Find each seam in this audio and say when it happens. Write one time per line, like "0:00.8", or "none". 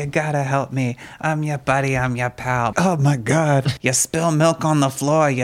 0:02.7
0:03.7